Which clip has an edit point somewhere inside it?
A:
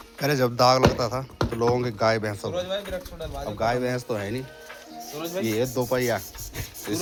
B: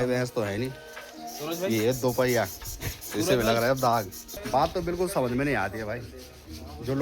B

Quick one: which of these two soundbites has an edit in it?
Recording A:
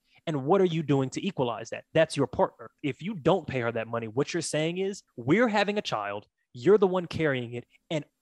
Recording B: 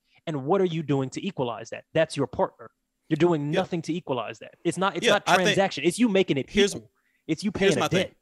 A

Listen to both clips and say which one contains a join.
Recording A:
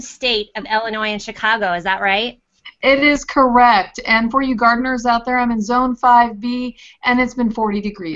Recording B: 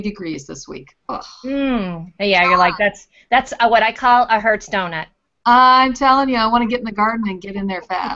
A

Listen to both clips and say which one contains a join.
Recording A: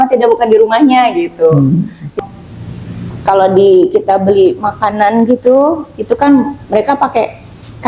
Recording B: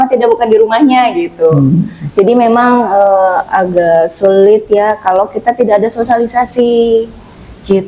A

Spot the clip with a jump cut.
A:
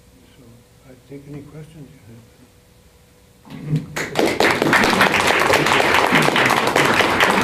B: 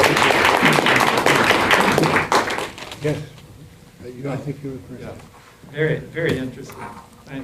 B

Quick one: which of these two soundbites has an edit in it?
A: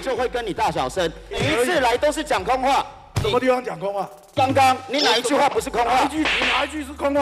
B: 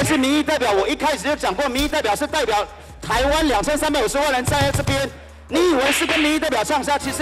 A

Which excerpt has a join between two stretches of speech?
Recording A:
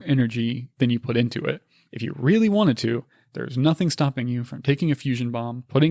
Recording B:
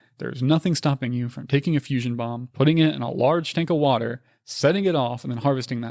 A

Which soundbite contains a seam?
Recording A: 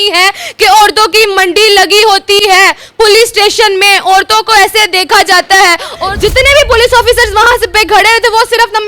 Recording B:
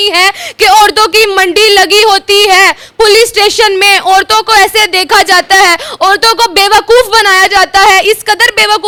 A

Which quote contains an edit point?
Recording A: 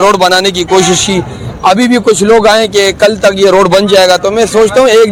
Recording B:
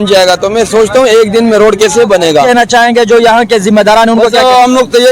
B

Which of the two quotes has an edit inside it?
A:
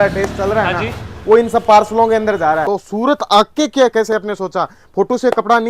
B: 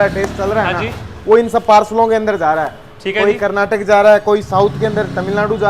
A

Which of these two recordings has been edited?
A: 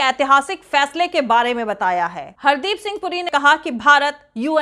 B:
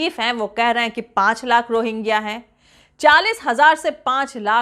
A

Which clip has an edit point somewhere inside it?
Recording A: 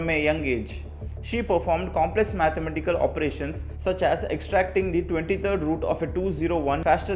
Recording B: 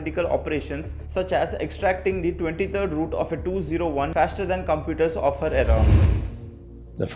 B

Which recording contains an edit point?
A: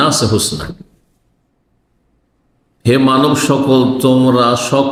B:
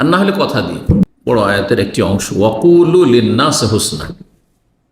B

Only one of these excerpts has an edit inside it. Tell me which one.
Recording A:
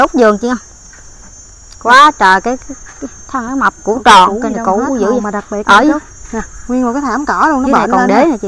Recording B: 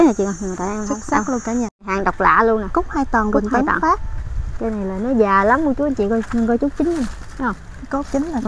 B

